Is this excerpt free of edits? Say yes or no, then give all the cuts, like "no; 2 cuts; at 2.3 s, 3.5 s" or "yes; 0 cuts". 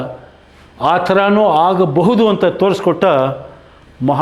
yes; 0 cuts